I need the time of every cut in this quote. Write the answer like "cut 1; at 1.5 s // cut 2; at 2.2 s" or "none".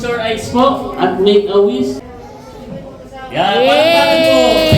cut 1; at 2.0 s